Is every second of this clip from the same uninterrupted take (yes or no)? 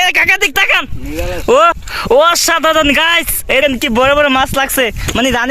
no